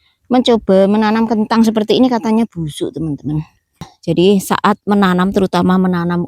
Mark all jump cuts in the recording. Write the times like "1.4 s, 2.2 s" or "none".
3.9 s